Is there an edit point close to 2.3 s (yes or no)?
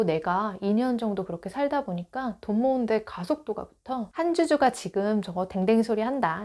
no